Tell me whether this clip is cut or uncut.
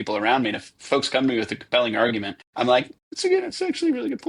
cut